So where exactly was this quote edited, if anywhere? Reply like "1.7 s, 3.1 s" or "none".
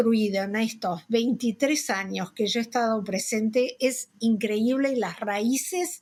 none